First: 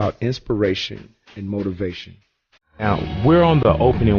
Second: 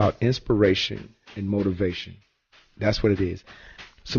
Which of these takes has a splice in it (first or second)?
second